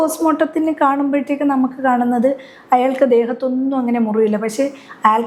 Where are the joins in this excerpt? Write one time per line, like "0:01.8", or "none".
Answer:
none